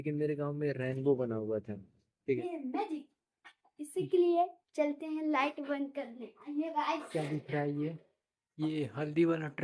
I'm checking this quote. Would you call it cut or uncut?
cut